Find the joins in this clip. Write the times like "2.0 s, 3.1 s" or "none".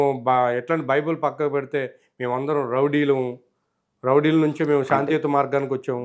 none